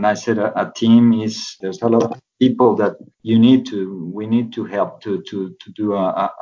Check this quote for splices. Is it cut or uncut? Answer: cut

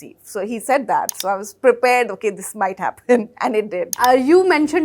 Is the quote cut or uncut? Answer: cut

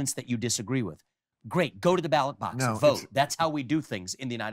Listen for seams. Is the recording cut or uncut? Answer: uncut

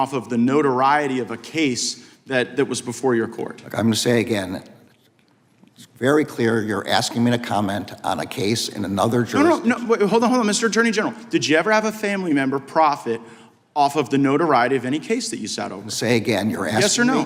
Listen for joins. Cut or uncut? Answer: uncut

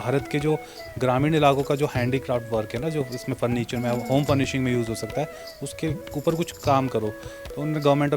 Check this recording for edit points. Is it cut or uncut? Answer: uncut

